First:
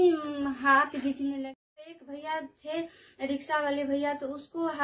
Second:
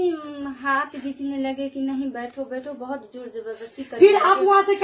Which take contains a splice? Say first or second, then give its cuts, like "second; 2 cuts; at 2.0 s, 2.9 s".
first; 1 cut; at 1.5 s